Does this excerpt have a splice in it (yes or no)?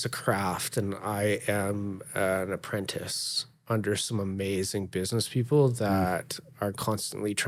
no